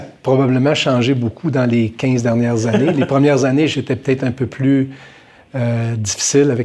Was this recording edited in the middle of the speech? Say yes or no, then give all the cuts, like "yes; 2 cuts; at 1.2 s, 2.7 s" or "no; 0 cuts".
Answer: no; 0 cuts